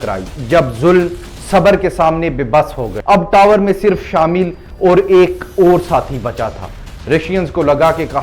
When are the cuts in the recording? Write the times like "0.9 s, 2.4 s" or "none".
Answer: 2.9 s